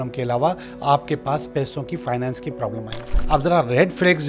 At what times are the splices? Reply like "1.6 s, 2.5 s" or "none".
3.2 s